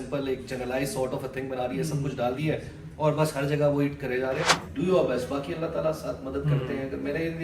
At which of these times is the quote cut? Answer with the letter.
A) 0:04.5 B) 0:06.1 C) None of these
A